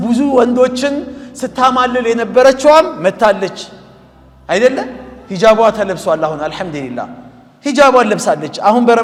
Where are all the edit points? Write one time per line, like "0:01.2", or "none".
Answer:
none